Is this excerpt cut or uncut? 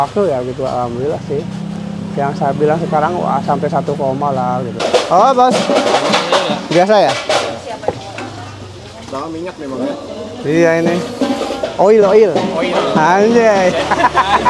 uncut